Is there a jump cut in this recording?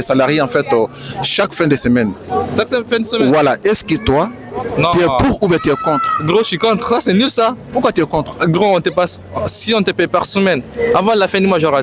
no; 0 cuts

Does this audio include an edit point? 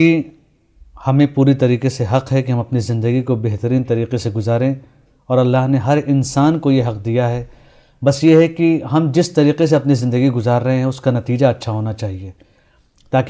no; 0 cuts

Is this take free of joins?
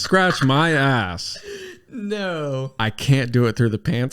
no; 1 cut; at 2.7 s

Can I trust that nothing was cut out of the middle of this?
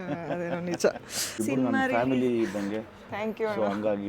no; 1 cut; at 1.4 s

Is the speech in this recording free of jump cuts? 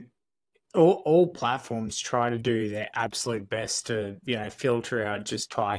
yes; 0 cuts

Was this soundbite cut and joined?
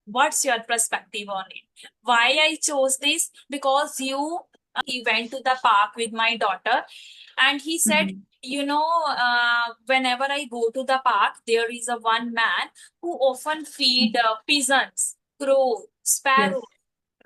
yes; 1 cut; at 4.6 s

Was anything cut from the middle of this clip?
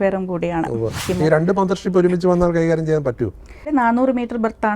yes; 2 cuts; at 1.0 s, 3.7 s

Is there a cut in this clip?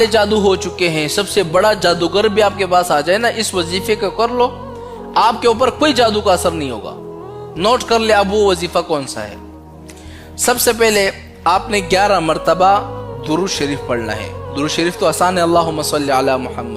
yes; 1 cut; at 15.5 s

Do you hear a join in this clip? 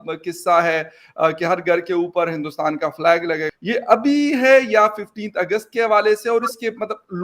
yes; 1 cut; at 3.5 s

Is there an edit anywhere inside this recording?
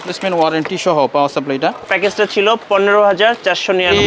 yes; 1 cut; at 1.9 s

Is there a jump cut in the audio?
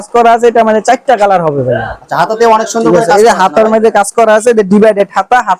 no; 0 cuts

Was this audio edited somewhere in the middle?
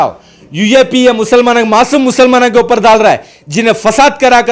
no; 0 cuts

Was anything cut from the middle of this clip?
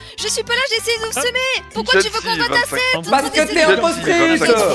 yes; 1 cut; at 1.7 s

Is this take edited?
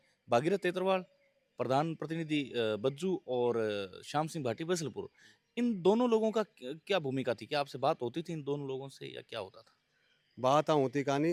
no; 0 cuts

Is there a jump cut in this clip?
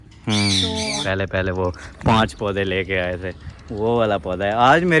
yes; 1 cut; at 1.0 s

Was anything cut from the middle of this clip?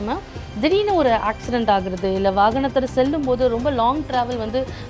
no; 0 cuts

